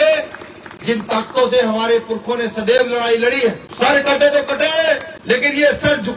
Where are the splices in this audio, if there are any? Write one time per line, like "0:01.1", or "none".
0:03.6
0:05.1

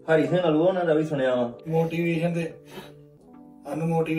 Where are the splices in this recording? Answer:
0:01.6

